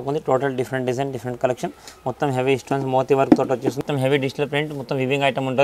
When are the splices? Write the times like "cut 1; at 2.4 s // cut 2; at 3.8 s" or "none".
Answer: cut 1; at 3.8 s